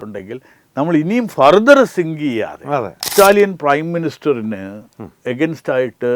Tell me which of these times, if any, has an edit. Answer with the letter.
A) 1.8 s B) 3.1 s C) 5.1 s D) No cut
B